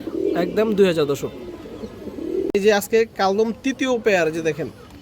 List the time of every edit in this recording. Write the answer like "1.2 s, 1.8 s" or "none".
2.5 s